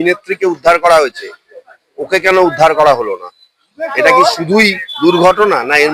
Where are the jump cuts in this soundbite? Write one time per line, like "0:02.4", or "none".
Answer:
none